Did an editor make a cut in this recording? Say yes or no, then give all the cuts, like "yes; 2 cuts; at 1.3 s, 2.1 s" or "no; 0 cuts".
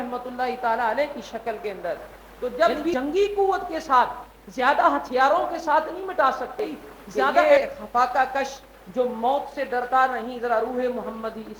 yes; 2 cuts; at 2.6 s, 7.4 s